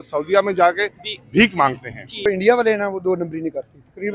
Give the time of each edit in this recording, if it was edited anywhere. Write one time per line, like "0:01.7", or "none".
0:02.3